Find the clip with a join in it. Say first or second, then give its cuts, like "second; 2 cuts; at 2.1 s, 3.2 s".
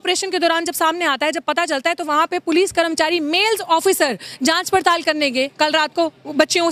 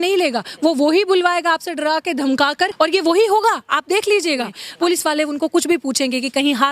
second; 2 cuts; at 2.7 s, 4.6 s